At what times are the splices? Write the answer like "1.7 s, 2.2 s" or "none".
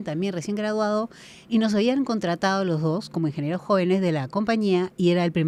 none